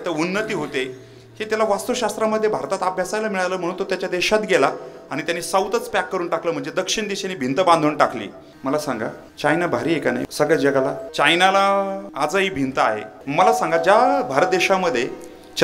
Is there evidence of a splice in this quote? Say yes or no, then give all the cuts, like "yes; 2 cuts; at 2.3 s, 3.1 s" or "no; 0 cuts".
yes; 6 cuts; at 8.4 s, 9.2 s, 10.2 s, 11.1 s, 12.1 s, 13.1 s